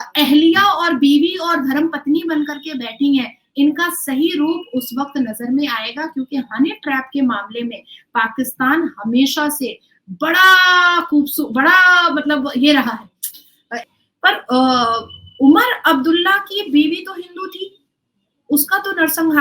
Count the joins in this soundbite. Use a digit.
1